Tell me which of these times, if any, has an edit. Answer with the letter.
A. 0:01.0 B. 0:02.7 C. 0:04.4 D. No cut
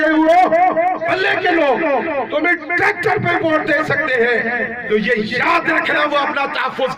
A